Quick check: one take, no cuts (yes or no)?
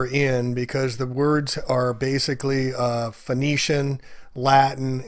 yes